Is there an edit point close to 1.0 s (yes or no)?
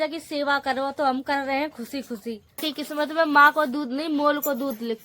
no